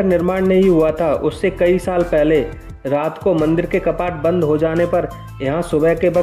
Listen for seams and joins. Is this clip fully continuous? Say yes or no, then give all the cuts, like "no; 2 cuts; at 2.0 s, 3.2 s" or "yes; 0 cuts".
yes; 0 cuts